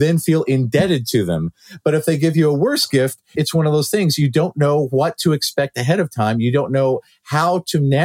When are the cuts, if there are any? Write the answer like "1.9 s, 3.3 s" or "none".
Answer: 3.2 s